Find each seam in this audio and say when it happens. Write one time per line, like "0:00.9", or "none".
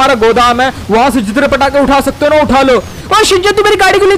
0:03.0